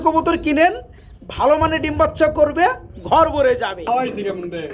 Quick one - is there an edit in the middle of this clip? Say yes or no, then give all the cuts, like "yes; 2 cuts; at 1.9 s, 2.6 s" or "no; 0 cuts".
yes; 1 cut; at 3.8 s